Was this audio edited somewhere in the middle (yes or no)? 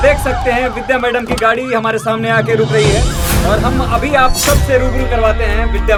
no